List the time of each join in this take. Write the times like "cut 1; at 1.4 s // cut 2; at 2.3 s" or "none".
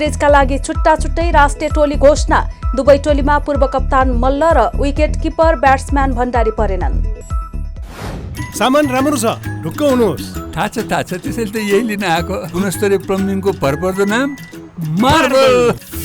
cut 1; at 8.3 s